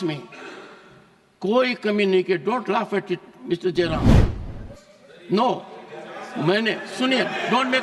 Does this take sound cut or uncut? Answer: uncut